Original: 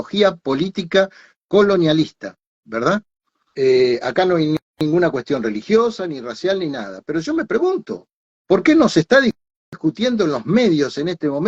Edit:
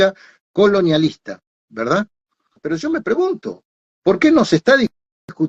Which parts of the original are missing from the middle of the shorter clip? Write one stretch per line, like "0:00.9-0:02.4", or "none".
0:03.4-0:06.9